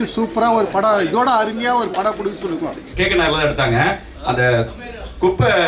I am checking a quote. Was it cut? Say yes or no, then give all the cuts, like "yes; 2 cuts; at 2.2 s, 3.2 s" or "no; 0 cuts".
yes; 1 cut; at 2.9 s